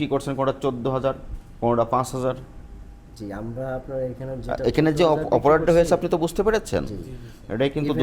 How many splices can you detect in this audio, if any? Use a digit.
0